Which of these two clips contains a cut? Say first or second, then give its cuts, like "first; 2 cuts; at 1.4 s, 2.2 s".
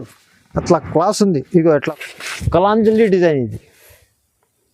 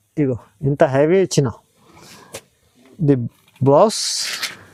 first; 1 cut; at 1.9 s